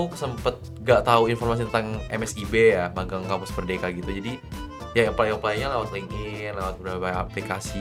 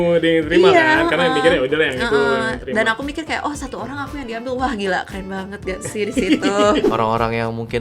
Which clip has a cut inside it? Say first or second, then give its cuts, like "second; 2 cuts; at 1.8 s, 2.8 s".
second; 1 cut; at 6.9 s